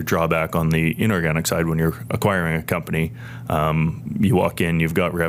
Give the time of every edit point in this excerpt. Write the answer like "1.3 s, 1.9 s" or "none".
none